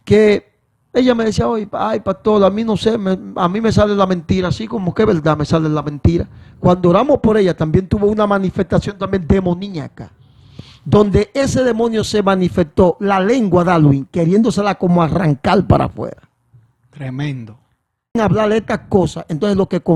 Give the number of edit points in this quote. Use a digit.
1